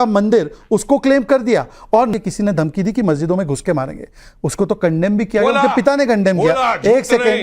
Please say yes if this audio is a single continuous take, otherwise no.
no